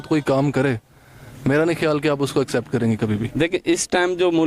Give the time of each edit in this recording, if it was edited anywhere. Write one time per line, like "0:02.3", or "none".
0:03.2